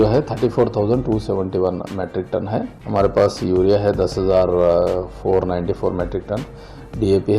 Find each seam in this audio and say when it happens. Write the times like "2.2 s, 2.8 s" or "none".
2.8 s